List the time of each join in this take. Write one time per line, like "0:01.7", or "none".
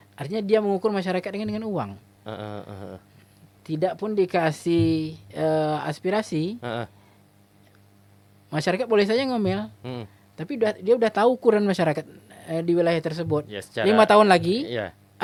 none